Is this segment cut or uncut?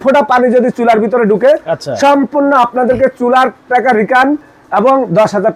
uncut